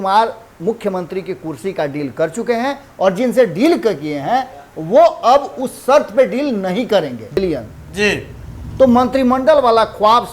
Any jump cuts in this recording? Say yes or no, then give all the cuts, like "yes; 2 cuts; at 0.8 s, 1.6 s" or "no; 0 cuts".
yes; 1 cut; at 7.4 s